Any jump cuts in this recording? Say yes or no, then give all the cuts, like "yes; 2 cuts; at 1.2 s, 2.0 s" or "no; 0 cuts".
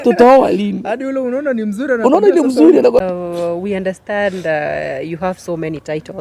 yes; 1 cut; at 3.0 s